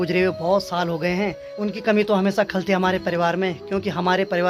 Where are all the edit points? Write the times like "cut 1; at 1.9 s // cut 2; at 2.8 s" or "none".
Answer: none